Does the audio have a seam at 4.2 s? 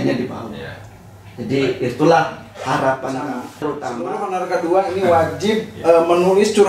yes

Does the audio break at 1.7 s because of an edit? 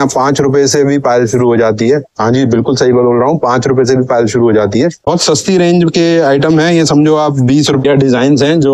no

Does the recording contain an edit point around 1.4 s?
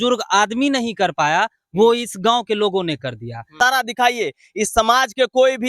no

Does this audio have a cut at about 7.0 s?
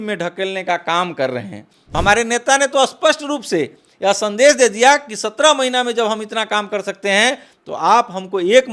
no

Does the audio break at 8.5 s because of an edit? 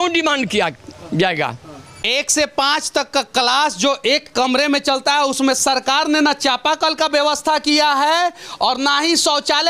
no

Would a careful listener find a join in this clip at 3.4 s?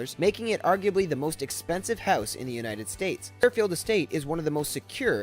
yes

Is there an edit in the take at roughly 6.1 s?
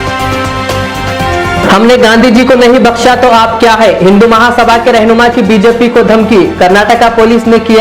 no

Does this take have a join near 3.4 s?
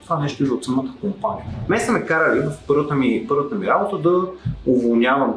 no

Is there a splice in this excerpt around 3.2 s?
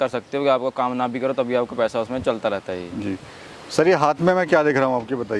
no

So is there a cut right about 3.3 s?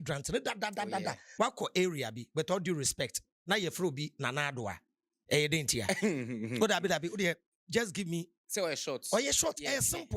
no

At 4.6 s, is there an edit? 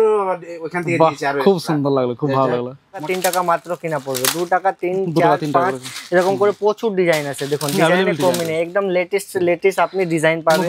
no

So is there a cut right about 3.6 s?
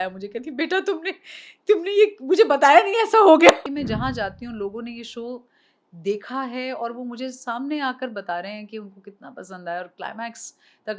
yes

